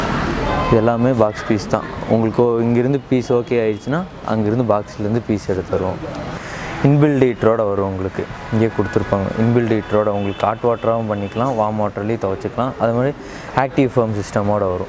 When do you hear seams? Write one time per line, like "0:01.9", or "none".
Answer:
0:06.4